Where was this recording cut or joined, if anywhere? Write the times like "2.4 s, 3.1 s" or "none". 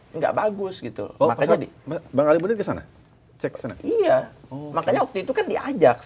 none